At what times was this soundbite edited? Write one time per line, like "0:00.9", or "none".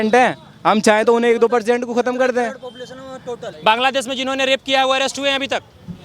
0:03.4